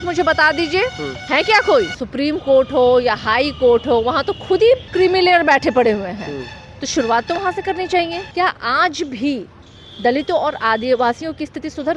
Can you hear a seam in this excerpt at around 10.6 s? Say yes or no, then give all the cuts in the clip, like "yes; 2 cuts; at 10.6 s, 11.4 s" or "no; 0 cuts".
no; 4 cuts; at 1.1 s, 2.0 s, 4.9 s, 8.2 s